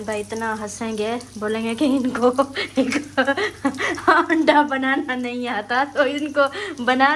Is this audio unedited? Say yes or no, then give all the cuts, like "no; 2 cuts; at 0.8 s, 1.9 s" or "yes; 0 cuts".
yes; 0 cuts